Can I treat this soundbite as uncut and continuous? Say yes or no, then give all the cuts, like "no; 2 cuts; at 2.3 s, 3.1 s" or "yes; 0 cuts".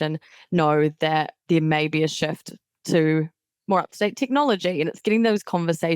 no; 1 cut; at 1.3 s